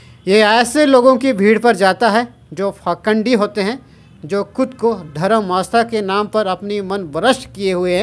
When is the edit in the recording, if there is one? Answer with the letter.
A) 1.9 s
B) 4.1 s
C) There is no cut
C